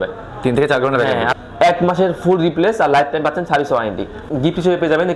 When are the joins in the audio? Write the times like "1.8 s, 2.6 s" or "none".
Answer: 1.3 s, 4.2 s